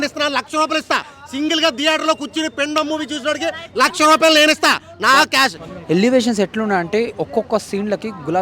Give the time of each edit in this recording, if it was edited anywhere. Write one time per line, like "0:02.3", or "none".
0:05.7